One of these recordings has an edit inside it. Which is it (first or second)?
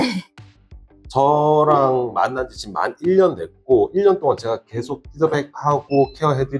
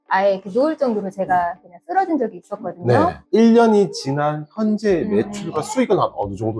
second